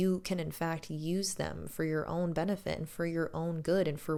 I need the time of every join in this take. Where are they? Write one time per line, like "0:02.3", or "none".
none